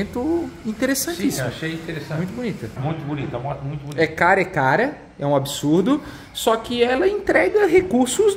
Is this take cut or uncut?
uncut